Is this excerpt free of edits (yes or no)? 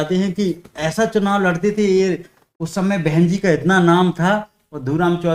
yes